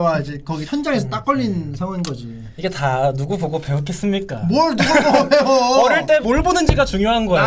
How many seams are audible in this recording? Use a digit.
1